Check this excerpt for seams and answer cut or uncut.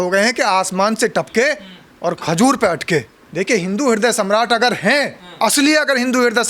cut